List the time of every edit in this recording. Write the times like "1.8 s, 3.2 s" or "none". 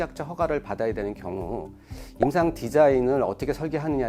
none